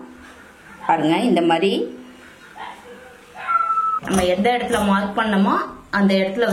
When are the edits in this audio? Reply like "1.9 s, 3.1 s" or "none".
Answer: 4.0 s